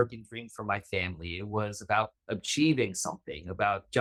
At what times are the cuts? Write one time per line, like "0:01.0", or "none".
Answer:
none